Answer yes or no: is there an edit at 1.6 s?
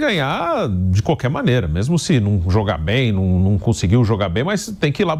no